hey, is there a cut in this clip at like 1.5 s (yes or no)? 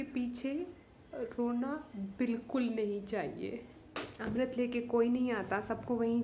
no